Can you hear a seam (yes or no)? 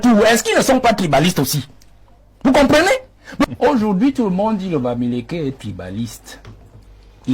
yes